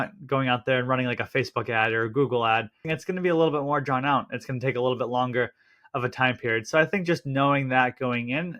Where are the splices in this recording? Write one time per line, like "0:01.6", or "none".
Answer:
0:02.9